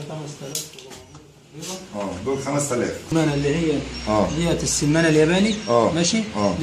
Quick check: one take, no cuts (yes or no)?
no